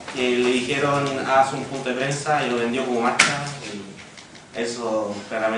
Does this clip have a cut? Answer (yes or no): yes